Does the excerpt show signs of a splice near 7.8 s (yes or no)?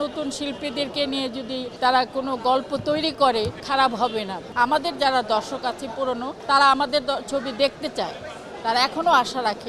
no